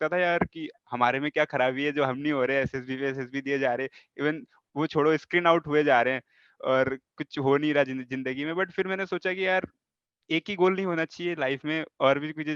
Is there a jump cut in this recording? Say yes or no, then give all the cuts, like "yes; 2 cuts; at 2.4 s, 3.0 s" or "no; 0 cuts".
no; 0 cuts